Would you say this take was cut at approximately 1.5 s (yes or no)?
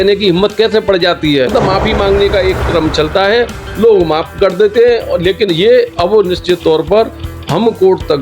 yes